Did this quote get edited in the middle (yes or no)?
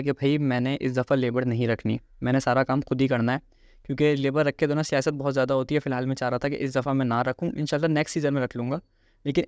no